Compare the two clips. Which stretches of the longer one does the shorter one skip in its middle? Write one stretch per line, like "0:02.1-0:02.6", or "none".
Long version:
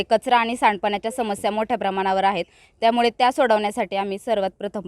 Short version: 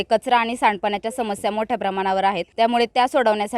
0:02.5-0:02.7